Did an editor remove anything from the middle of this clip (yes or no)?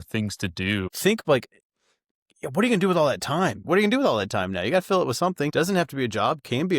yes